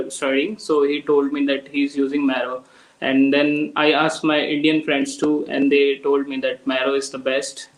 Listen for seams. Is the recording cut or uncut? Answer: uncut